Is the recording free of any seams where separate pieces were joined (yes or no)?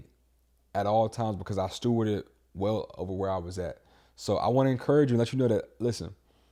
yes